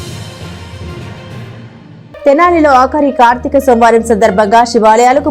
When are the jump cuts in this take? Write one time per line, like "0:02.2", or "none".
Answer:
none